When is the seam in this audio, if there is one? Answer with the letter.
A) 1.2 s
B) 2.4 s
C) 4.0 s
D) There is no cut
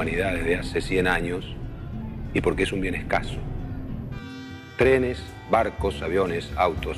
A